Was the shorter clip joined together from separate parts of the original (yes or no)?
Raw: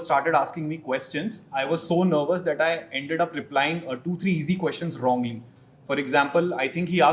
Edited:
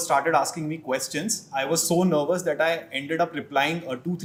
no